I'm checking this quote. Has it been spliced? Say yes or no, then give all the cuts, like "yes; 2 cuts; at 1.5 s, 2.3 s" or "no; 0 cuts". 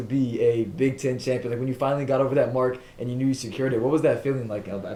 no; 0 cuts